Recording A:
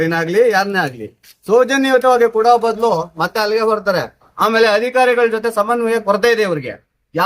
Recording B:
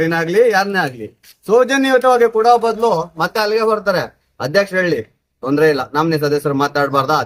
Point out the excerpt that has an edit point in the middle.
A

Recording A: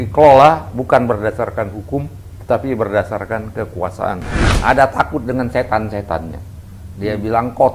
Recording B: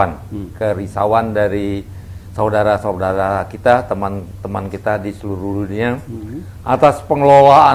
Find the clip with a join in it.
A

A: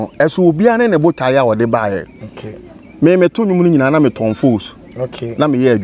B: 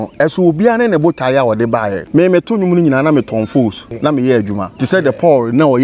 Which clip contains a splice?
B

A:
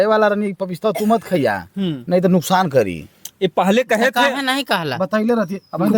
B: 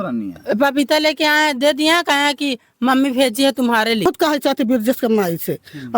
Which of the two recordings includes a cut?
B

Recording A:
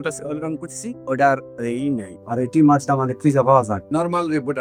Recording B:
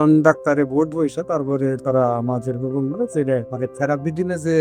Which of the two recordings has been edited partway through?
B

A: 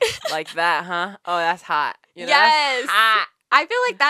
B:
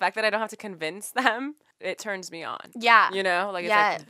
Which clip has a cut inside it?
B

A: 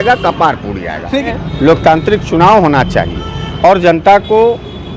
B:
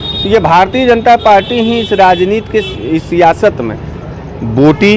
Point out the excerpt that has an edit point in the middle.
A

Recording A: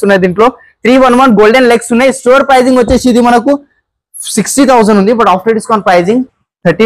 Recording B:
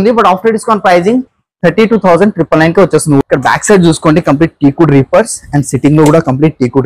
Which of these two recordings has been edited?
B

